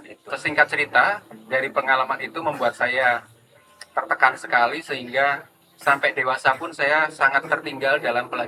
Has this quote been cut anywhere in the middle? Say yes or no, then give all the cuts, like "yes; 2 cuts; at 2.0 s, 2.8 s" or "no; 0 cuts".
no; 0 cuts